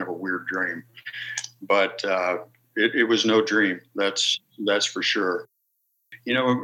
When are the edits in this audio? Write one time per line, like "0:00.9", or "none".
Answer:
0:05.6